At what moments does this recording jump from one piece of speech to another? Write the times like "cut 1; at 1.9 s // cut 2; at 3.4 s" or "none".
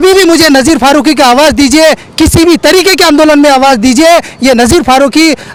none